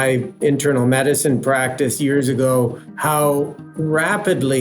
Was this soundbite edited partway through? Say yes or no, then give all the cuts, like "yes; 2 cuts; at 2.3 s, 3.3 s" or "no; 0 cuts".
yes; 2 cuts; at 2.9 s, 3.6 s